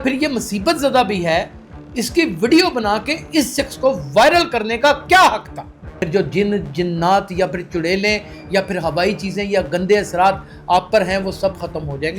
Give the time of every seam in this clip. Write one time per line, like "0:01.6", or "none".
0:05.8